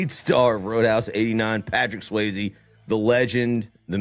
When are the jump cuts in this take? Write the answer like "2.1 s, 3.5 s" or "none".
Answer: none